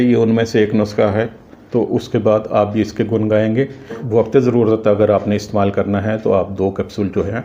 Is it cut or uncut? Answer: cut